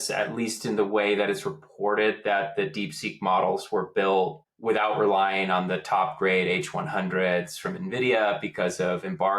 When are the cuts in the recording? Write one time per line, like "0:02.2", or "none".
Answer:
0:04.5